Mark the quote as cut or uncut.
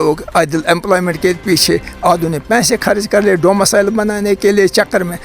uncut